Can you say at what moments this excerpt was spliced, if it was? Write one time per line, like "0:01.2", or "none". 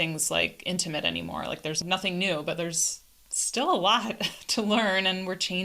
0:01.8